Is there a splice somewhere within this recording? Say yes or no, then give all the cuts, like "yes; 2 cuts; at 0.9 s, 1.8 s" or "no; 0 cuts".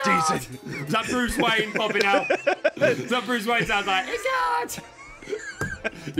no; 0 cuts